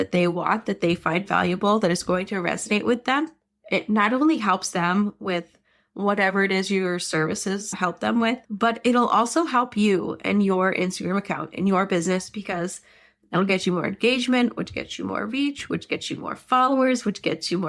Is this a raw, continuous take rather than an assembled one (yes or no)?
yes